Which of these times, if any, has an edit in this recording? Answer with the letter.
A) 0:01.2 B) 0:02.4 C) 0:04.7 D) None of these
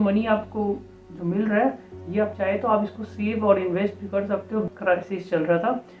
C